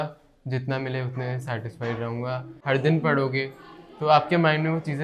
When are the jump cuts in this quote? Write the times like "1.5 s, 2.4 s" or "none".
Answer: 2.5 s

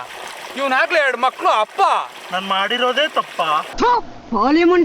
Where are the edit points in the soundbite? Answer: 3.7 s

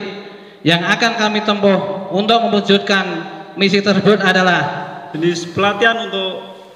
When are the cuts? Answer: 5.1 s

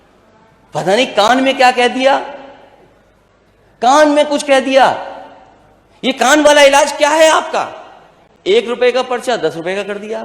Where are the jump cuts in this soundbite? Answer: 8.4 s

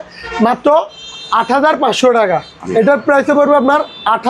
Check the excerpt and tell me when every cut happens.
2.6 s

